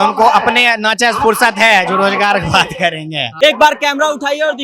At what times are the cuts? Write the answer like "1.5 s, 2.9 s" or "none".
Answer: 3.3 s